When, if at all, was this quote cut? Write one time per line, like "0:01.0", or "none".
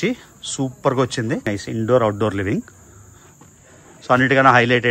0:01.5

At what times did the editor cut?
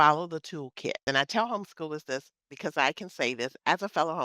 0:01.0

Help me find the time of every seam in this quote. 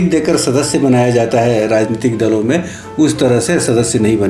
none

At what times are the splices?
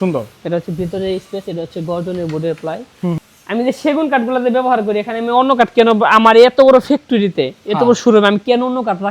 0:03.2

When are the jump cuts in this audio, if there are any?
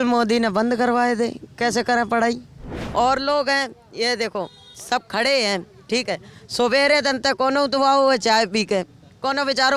0:02.8

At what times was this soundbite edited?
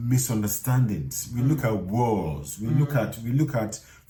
none

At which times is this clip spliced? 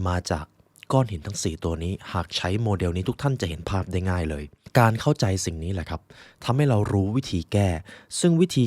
0:04.5

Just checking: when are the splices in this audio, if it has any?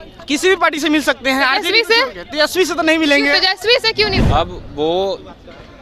0:04.2

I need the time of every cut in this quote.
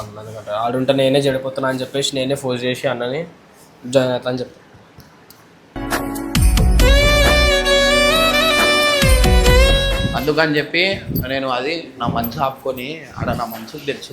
0:10.0

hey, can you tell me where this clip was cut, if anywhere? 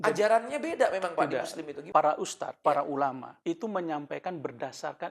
0:01.7
0:02.4
0:03.3

